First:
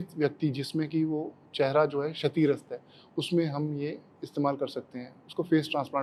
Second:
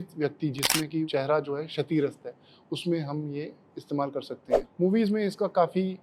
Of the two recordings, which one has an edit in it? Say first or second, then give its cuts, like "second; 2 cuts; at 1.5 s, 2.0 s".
second; 2 cuts; at 1.1 s, 4.6 s